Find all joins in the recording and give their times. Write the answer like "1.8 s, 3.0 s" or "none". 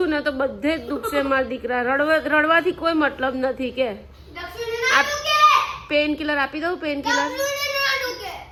none